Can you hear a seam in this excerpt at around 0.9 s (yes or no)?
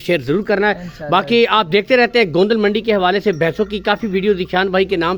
no